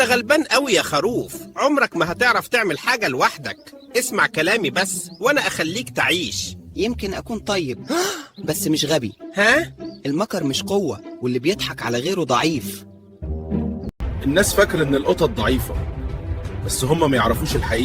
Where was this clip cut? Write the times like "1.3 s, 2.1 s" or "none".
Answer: 14.1 s